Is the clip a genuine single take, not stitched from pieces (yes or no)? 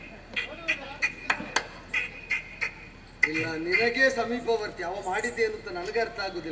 yes